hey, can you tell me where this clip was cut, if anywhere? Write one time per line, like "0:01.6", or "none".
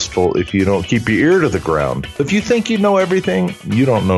0:02.2